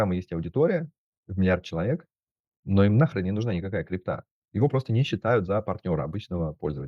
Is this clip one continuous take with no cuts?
no; 1 cut; at 4.4 s

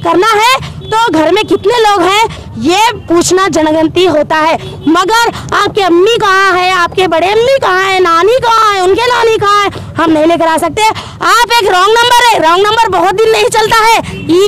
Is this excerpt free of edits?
no; 1 cut; at 11.1 s

